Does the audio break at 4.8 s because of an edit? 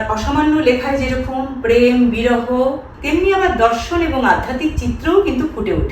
no; 1 cut; at 2.9 s

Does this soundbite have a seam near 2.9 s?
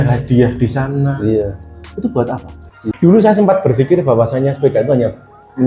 yes; 1 cut; at 2.9 s

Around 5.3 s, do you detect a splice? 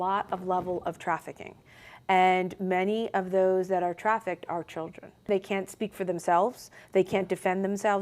yes; 1 cut; at 5.3 s

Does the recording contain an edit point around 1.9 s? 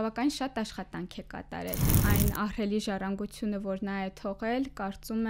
yes; 1 cut; at 1.9 s

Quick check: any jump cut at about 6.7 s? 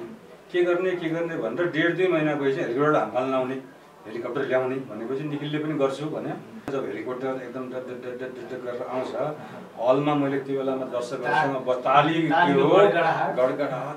yes; 1 cut; at 6.7 s

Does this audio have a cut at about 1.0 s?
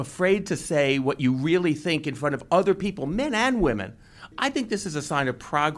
no; 1 cut; at 4.3 s

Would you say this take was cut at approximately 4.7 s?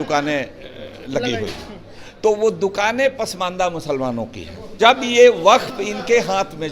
yes; 1 cut; at 4.7 s

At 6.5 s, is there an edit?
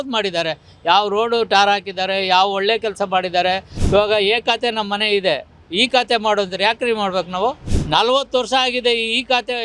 no; 2 cuts; at 3.7 s, 7.7 s

